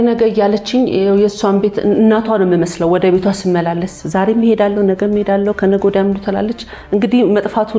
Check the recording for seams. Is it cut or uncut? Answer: uncut